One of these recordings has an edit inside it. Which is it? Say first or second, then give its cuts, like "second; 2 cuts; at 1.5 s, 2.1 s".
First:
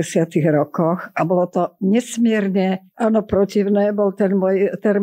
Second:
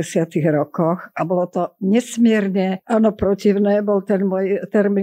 second; 1 cut; at 2.8 s